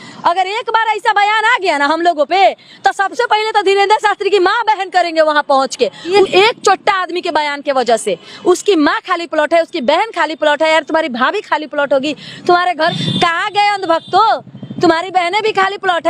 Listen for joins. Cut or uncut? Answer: cut